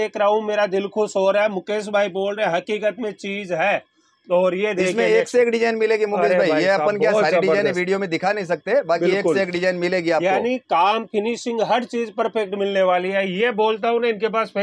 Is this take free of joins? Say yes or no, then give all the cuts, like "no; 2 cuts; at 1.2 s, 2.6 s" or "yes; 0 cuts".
yes; 0 cuts